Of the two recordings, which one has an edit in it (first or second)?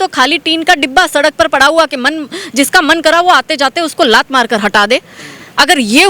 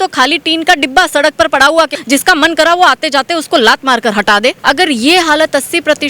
second